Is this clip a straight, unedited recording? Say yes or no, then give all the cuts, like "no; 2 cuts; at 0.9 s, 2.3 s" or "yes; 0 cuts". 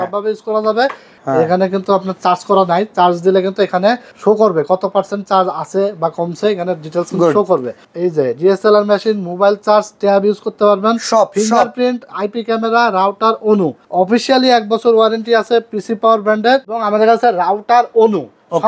no; 5 cuts; at 1.1 s, 4.1 s, 7.8 s, 13.8 s, 16.8 s